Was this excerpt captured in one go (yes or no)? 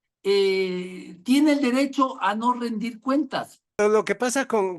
no